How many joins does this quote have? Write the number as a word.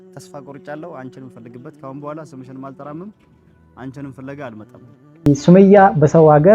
one